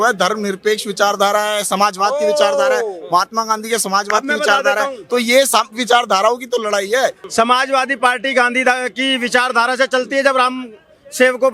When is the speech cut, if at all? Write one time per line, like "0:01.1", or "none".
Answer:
0:07.2